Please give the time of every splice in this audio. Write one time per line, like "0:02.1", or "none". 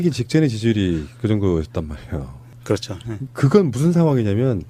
none